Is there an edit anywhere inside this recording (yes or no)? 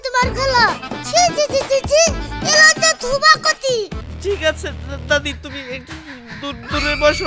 yes